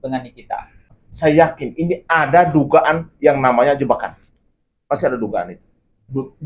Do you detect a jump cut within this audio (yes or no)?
yes